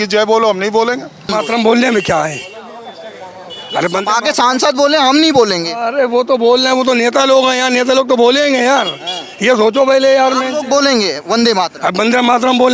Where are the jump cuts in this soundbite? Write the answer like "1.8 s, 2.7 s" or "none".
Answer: 1.2 s

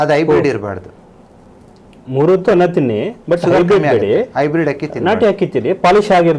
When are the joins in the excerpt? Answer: none

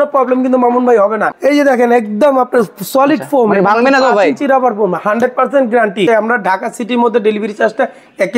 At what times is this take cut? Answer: 1.3 s, 6.1 s

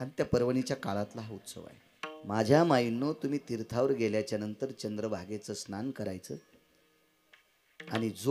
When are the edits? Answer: 2.2 s

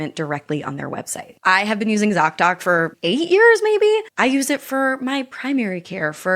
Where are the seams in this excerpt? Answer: 1.2 s, 3.0 s

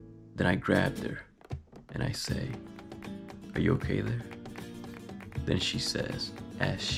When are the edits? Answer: none

